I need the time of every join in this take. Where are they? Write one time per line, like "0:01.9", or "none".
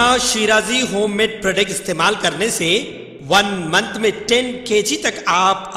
none